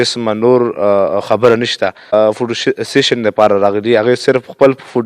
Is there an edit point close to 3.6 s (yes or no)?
no